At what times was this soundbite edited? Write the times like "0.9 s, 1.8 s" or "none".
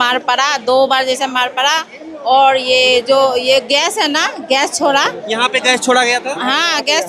none